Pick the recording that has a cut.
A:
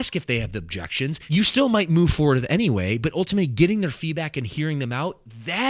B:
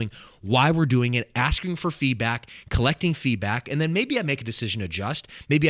A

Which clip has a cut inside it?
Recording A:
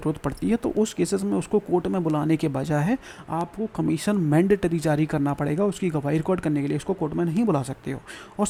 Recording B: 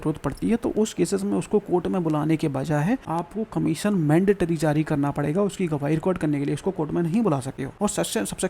B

